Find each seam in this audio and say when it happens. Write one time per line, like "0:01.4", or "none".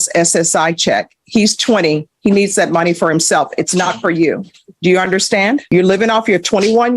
0:05.6